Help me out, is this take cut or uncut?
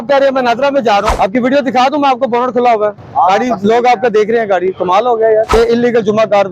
cut